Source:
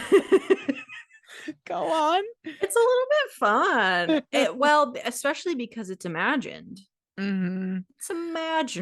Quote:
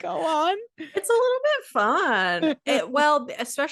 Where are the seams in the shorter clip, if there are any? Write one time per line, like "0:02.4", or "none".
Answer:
none